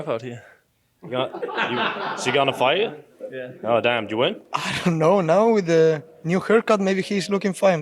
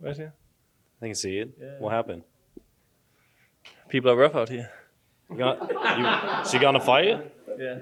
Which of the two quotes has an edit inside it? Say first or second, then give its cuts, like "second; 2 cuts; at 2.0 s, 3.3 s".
first; 1 cut; at 4.5 s